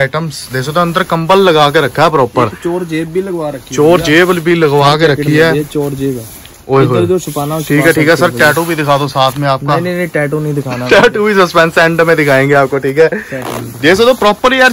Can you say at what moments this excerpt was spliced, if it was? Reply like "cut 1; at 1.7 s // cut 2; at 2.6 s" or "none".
none